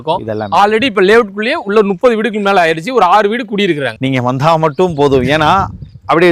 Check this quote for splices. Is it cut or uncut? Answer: uncut